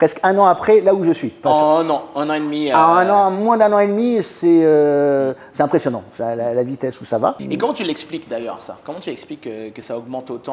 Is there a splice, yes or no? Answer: yes